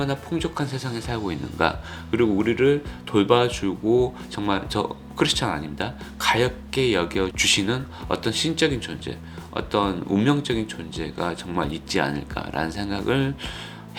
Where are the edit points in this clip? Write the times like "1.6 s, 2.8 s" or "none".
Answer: none